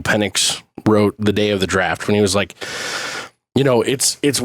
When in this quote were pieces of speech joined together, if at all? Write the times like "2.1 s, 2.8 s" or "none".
2.0 s